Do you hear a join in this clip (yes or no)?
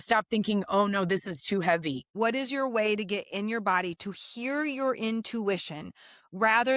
yes